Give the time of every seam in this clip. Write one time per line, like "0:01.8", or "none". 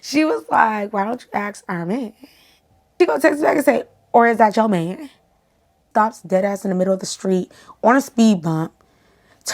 0:03.0
0:05.9

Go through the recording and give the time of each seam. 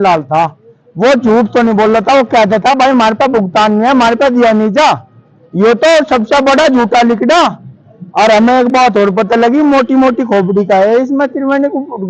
none

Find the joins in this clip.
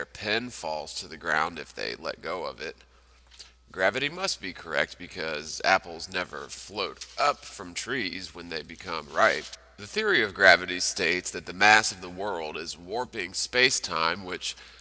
0:08.2

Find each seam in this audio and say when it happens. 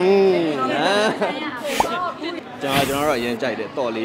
0:02.4

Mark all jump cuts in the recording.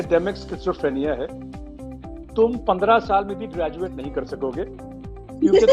none

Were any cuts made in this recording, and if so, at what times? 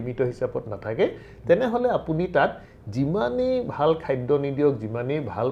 none

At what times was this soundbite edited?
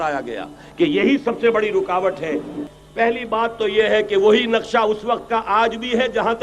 0:02.6

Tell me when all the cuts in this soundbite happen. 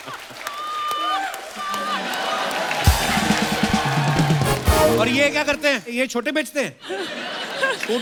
none

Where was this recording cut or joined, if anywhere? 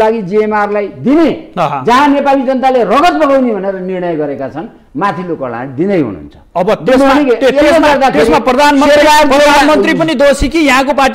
none

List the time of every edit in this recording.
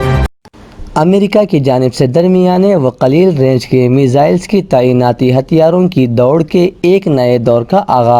none

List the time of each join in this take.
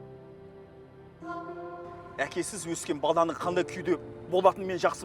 0:01.0
0:02.1

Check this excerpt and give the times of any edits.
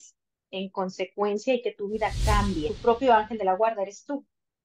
0:02.7

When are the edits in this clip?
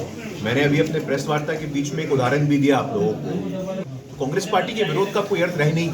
0:03.8

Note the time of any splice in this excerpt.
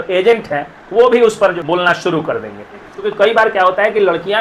0:01.6
0:02.8

